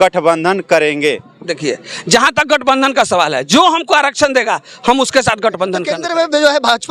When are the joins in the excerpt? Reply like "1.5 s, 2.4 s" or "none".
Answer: 5.9 s